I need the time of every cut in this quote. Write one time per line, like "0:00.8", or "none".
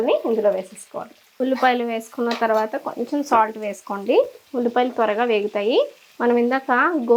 none